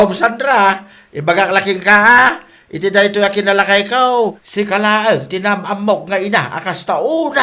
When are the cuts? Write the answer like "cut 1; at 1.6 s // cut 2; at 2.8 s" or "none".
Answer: cut 1; at 4.4 s